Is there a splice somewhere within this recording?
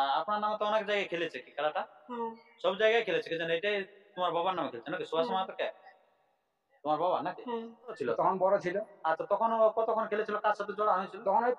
yes; 1 cut; at 8.0 s

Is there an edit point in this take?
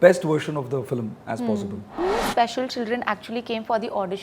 yes; 1 cut; at 2.0 s

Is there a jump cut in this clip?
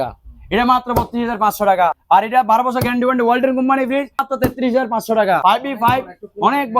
yes; 3 cuts; at 2.0 s, 4.3 s, 5.4 s

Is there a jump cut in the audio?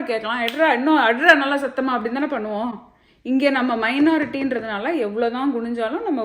no; 0 cuts

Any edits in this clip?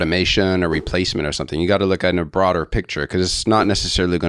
no; 0 cuts

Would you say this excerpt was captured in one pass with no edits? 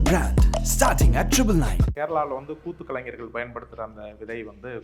no; 1 cut; at 1.9 s

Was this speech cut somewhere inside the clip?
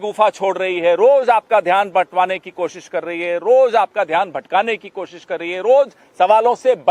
no; 0 cuts

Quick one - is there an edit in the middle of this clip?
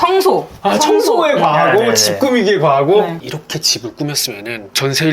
yes; 1 cut; at 3.2 s

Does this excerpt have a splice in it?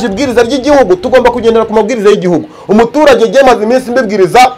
no; 0 cuts

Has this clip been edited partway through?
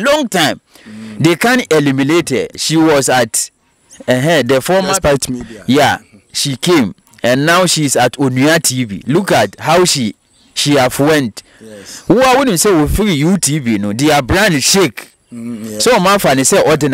yes; 1 cut; at 2.6 s

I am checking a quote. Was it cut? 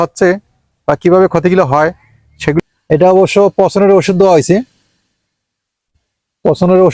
yes; 1 cut; at 2.6 s

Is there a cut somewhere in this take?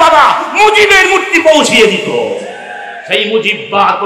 no; 0 cuts

